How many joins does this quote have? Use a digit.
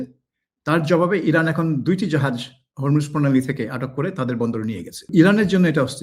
1